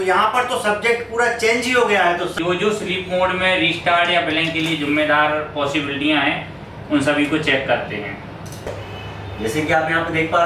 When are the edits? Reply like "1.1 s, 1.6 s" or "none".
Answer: 2.3 s, 8.7 s